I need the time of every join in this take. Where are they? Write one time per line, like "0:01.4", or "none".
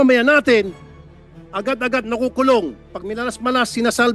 none